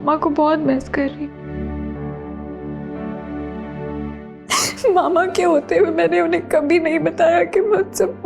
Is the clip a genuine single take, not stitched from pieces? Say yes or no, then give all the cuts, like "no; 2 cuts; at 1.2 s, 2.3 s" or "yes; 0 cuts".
yes; 0 cuts